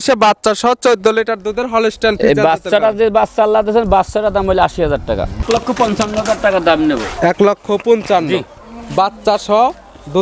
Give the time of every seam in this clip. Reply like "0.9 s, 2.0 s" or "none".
5.3 s

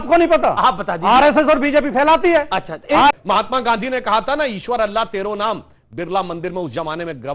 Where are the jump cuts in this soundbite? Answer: 3.1 s

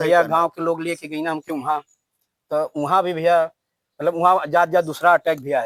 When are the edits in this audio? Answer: none

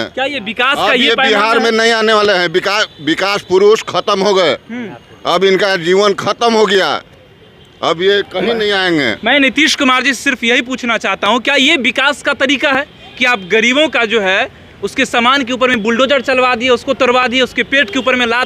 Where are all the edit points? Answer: none

